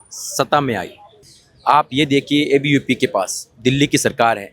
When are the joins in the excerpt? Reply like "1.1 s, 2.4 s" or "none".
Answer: 1.1 s